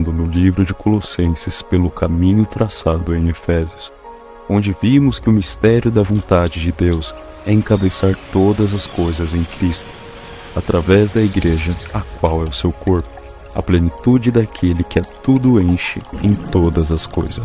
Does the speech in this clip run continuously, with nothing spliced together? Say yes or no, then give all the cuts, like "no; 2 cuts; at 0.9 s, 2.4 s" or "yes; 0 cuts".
no; 1 cut; at 4.8 s